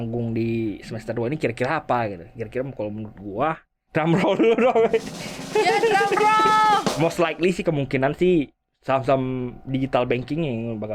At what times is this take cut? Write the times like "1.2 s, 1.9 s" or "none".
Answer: 3.7 s, 6.9 s

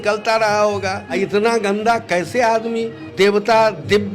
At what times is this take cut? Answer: 1.1 s, 3.0 s

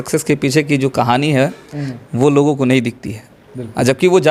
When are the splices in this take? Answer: none

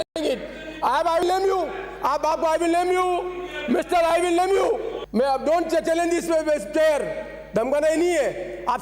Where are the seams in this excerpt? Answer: 5.0 s

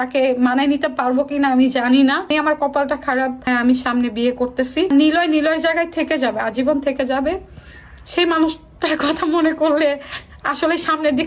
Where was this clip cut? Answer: 2.3 s, 3.5 s, 4.9 s

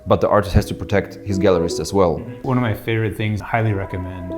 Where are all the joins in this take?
2.2 s, 3.4 s

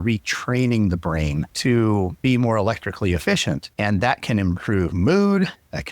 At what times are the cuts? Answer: 1.5 s, 2.2 s, 3.7 s

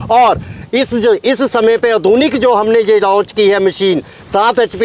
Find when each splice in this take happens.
none

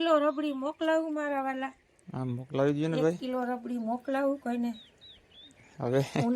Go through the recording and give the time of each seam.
none

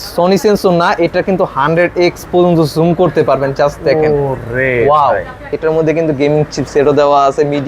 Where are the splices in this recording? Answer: 5.4 s

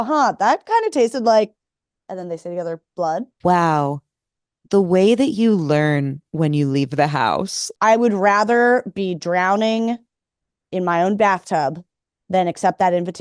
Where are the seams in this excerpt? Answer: 3.3 s, 7.6 s

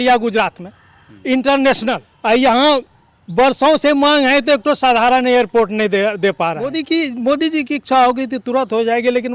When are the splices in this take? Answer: 2.1 s, 6.7 s

